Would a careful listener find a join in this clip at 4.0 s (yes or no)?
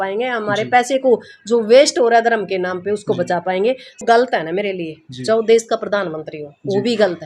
yes